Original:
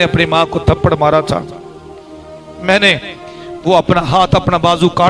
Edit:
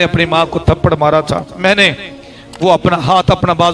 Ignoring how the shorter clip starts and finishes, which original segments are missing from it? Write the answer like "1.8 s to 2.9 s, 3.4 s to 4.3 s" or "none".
1.5 s to 2.5 s